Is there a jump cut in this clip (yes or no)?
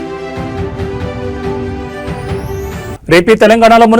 yes